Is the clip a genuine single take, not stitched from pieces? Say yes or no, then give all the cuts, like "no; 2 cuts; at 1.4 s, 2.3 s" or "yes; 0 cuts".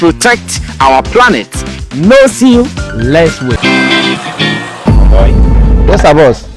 no; 1 cut; at 3.6 s